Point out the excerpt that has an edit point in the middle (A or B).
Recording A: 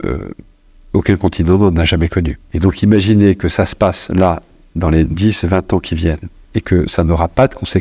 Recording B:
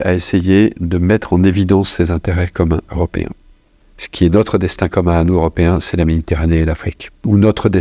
A